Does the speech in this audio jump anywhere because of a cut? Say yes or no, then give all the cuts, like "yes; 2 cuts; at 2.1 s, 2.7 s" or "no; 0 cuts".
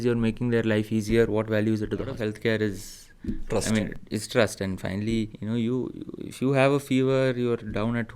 yes; 2 cuts; at 2.2 s, 5.4 s